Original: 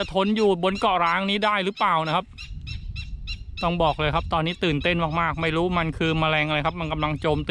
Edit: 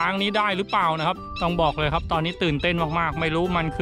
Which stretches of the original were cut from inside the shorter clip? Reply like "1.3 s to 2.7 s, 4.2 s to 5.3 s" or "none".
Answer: 2.3 s to 3.5 s

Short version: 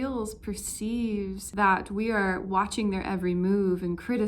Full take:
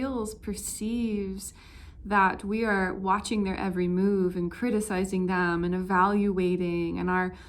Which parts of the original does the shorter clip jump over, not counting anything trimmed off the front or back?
1.4 s to 2.0 s

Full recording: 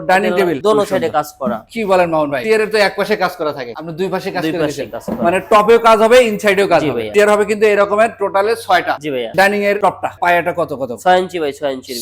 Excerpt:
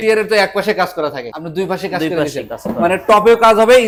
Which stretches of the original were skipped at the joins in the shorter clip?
none

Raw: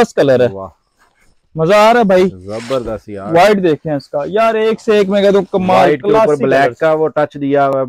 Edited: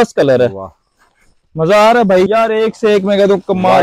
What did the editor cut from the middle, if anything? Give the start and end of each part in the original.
2.3 s to 4.3 s

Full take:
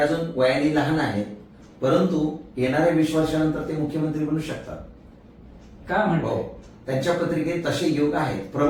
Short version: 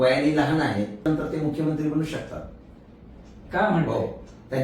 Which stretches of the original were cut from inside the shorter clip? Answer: 1.4 s to 3.4 s

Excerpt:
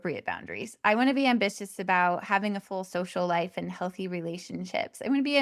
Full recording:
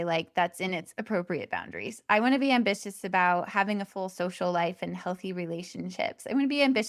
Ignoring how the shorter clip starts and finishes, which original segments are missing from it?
none

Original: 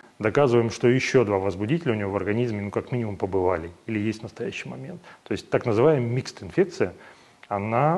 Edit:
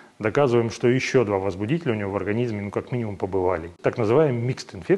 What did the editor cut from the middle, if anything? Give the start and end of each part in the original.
3.8 s to 5.4 s

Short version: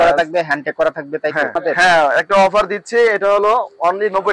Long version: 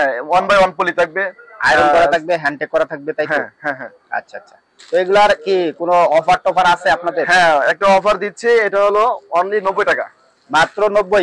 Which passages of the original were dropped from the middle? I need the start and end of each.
3.5 s to 7.1 s

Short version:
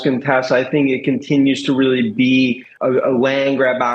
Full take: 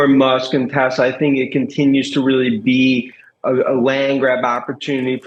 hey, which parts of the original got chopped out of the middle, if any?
3.1 s to 3.3 s

